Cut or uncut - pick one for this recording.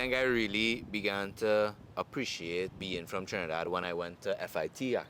cut